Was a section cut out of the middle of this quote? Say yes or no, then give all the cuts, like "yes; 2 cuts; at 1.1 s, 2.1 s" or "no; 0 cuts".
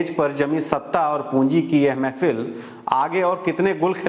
no; 0 cuts